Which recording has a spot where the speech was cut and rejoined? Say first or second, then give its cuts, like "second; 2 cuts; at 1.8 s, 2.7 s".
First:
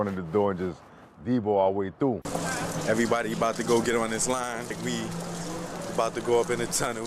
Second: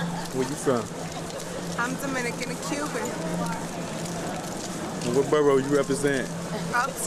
first; 1 cut; at 2.3 s